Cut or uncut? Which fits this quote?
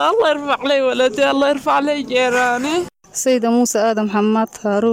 cut